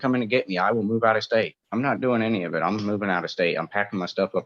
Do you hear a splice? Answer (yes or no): yes